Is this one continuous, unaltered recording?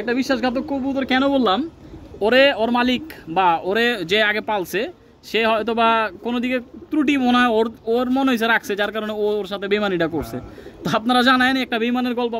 yes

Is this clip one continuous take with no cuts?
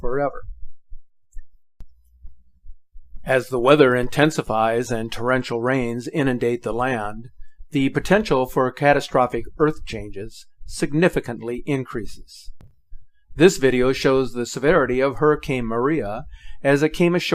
no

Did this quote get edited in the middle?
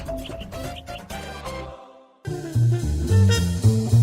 yes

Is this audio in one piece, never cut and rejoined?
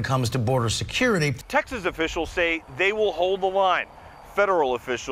no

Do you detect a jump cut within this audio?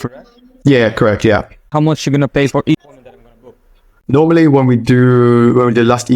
yes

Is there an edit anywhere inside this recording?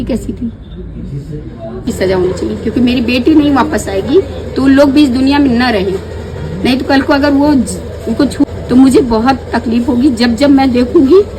yes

